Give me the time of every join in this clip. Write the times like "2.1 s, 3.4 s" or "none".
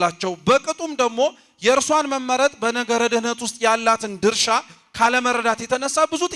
none

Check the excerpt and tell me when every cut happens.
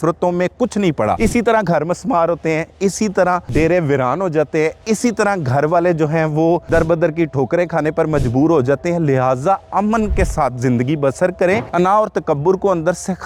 1.2 s, 3.5 s, 6.6 s, 11.7 s

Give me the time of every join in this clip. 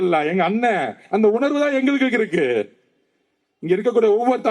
none

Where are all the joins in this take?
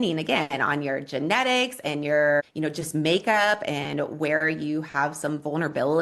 2.5 s

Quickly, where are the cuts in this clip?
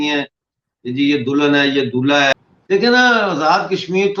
2.3 s

